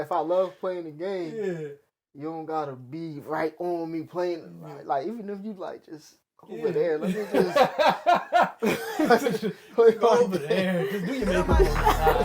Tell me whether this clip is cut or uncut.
uncut